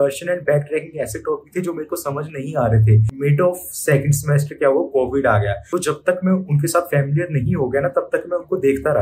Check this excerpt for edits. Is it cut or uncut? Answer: cut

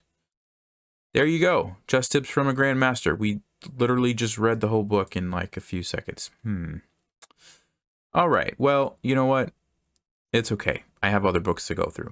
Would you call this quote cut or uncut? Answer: uncut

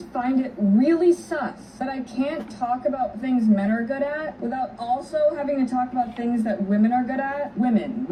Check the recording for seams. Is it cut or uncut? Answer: uncut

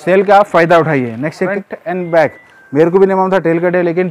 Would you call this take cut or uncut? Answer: cut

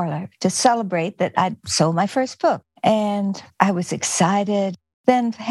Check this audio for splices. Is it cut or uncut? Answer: cut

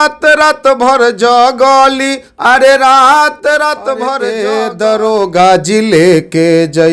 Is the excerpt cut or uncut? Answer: cut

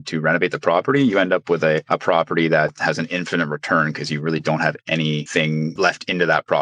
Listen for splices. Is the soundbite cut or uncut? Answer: uncut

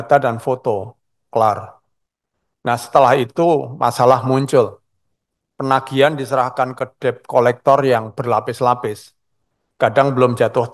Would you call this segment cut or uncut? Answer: uncut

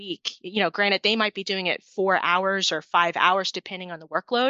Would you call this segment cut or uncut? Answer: uncut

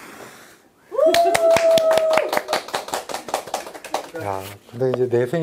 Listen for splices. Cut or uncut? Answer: cut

